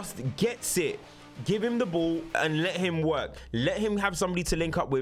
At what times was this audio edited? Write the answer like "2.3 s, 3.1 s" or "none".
none